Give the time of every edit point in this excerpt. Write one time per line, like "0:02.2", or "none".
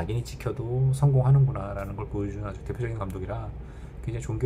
none